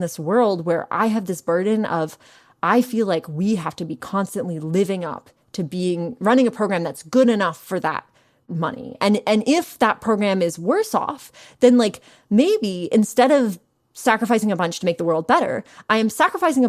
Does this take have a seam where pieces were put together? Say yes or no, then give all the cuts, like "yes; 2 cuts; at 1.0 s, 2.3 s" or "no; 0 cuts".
no; 0 cuts